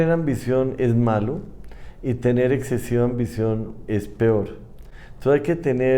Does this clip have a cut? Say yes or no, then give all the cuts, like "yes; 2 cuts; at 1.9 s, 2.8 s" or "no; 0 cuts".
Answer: no; 0 cuts